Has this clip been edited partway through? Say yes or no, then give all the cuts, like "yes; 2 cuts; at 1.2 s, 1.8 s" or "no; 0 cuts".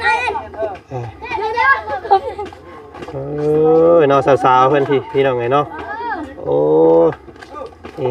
no; 0 cuts